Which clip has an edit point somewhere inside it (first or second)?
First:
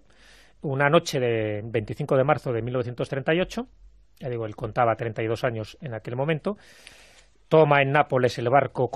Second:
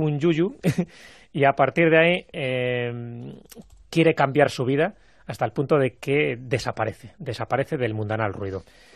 first